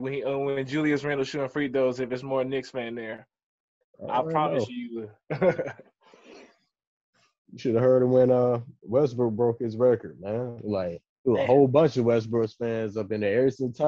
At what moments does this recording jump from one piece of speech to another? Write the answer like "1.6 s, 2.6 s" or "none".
none